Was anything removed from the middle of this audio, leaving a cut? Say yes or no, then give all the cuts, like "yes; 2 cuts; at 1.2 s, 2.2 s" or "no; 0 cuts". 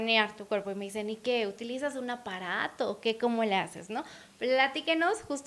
no; 0 cuts